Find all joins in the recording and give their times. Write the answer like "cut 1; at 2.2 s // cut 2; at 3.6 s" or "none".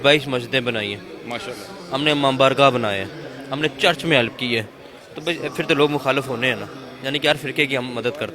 none